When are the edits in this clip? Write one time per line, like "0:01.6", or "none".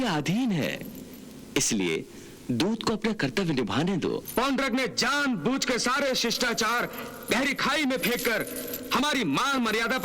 0:04.3